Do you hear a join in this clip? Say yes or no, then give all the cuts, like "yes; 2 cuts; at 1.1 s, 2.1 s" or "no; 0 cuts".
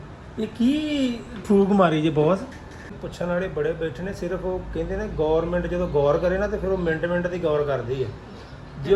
yes; 1 cut; at 3.0 s